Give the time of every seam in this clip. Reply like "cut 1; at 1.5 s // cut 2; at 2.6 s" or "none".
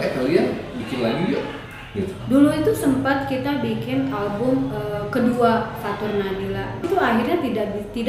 cut 1; at 2.2 s // cut 2; at 6.9 s